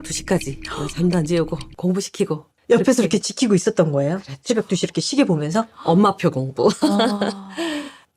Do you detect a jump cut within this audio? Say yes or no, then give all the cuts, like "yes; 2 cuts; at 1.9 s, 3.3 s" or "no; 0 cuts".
no; 0 cuts